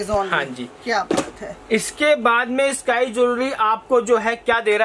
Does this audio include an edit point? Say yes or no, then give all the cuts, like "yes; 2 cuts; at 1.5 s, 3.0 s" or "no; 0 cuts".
no; 0 cuts